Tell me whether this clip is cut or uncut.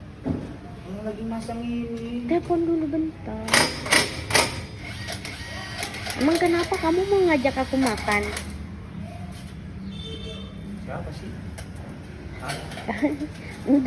uncut